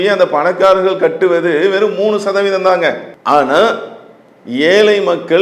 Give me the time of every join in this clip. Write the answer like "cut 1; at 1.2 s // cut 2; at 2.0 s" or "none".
cut 1; at 3.1 s